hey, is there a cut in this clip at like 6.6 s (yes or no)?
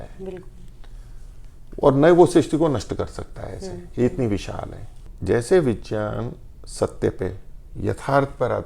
no